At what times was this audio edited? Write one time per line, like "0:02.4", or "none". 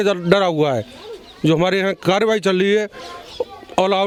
none